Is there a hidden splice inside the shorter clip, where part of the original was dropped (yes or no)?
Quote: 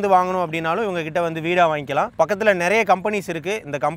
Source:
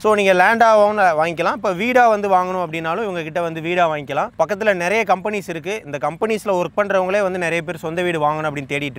no